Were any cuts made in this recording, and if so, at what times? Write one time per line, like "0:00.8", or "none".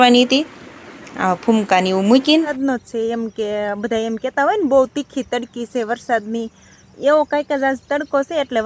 0:02.5